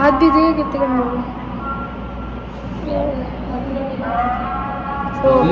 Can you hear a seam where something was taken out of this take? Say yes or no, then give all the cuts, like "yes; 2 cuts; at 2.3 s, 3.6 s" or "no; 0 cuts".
no; 0 cuts